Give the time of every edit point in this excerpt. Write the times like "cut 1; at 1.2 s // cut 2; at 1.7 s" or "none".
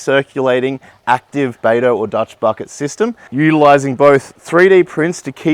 cut 1; at 1.6 s